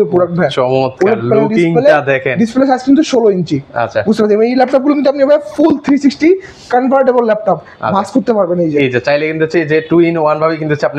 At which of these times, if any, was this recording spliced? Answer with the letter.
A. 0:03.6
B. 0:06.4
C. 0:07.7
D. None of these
D